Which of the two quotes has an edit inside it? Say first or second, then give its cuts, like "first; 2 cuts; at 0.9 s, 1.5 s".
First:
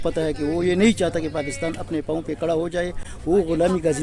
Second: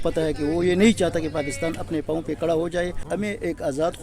second; 1 cut; at 3.0 s